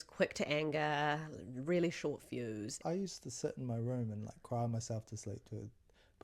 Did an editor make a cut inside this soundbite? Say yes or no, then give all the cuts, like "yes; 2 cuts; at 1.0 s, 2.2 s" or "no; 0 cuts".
yes; 1 cut; at 2.7 s